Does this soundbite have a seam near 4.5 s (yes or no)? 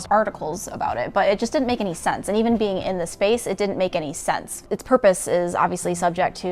yes